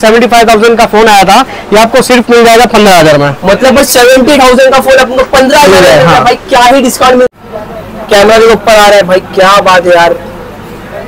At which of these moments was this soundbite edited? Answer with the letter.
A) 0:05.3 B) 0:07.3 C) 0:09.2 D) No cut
B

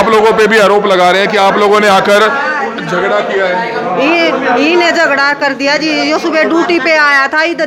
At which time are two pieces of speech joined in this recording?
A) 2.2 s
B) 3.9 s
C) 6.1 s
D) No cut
D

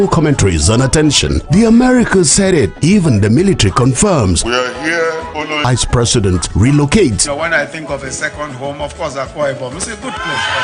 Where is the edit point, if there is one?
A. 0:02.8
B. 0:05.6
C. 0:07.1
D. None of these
B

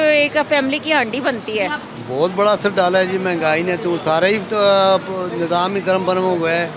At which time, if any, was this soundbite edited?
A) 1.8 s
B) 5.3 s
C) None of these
C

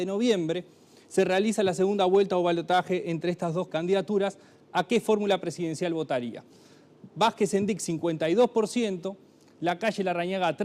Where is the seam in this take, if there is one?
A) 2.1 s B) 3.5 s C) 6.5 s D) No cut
D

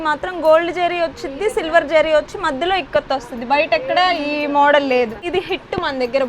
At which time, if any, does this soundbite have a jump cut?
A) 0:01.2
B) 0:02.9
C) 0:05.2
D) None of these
C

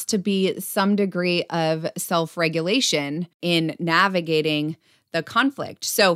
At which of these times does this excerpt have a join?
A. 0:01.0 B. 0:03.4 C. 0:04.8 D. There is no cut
B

